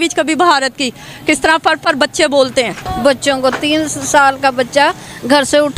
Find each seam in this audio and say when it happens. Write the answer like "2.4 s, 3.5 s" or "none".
2.8 s